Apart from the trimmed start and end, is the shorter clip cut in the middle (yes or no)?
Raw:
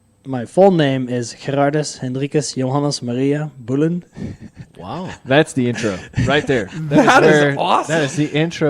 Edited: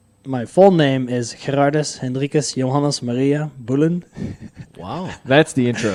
no